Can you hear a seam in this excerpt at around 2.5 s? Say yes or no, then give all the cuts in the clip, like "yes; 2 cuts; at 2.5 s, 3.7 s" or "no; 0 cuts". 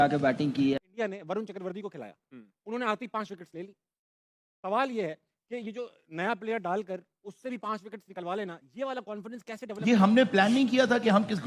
no; 2 cuts; at 0.9 s, 9.7 s